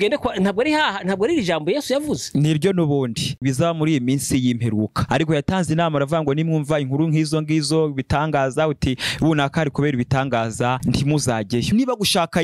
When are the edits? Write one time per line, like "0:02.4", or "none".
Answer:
0:03.4
0:11.7

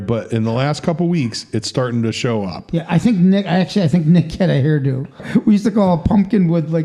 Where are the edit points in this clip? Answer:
0:05.2

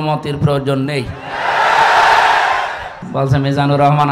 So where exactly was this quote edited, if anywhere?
0:03.0

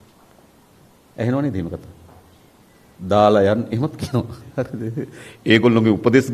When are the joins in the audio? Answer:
none

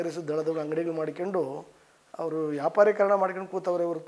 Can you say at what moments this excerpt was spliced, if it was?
none

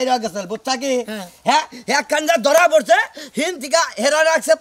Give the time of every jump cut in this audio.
none

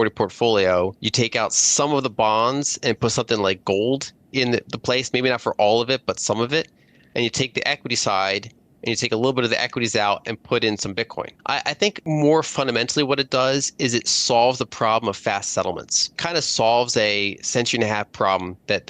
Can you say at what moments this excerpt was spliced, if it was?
0:01.0
0:11.6
0:16.2

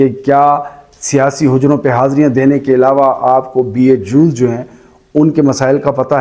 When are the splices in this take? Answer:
none

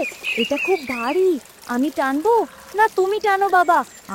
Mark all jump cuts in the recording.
none

